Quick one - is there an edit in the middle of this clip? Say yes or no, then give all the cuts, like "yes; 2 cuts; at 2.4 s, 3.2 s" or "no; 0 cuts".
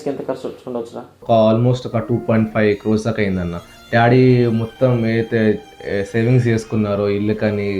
yes; 1 cut; at 1.1 s